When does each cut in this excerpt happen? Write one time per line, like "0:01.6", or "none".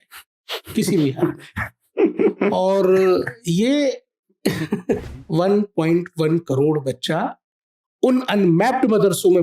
0:05.2